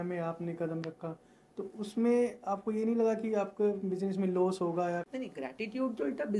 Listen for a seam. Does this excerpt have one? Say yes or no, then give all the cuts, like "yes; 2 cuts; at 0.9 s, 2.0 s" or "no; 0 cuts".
yes; 1 cut; at 5.0 s